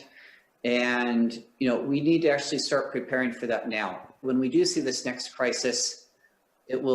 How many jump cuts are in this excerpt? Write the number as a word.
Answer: one